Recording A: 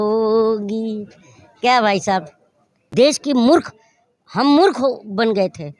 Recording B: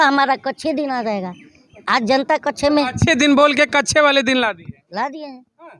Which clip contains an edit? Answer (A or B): A